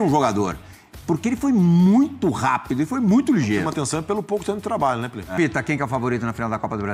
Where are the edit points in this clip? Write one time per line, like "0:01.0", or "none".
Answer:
0:05.3